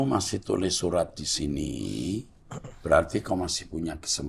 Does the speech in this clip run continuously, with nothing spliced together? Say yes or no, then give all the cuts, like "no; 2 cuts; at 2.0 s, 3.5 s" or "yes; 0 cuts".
yes; 0 cuts